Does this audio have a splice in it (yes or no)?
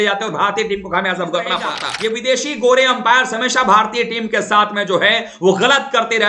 yes